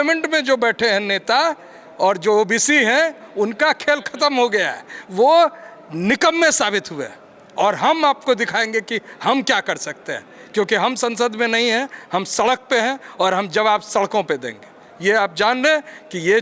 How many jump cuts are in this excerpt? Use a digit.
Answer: 0